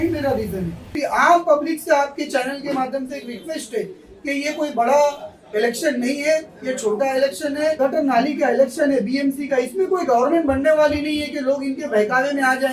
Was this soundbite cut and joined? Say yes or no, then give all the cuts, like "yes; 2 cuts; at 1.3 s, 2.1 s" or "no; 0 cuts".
yes; 2 cuts; at 0.9 s, 7.8 s